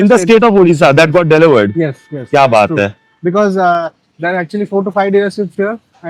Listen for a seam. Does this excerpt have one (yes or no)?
no